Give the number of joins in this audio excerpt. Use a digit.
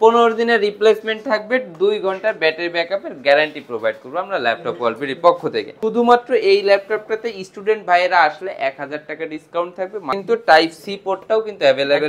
2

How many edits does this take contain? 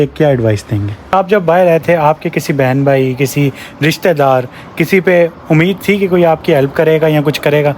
1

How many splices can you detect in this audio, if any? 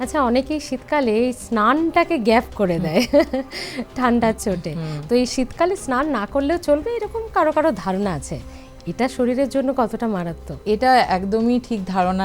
0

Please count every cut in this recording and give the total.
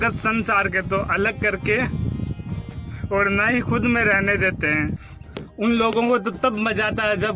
1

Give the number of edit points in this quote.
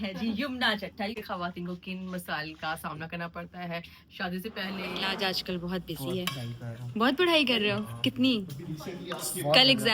2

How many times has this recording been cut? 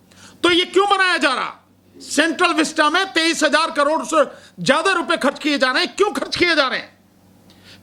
0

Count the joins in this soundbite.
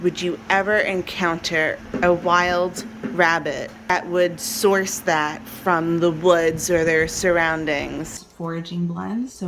2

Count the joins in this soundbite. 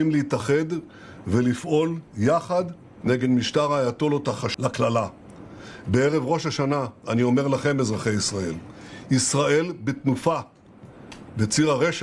1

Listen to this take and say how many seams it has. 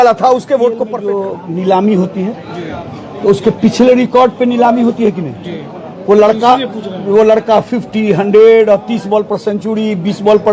1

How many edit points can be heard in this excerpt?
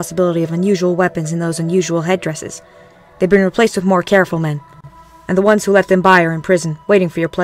1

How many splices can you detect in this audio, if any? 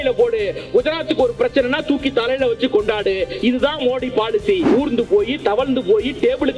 1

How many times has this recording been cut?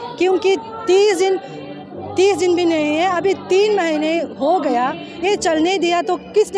0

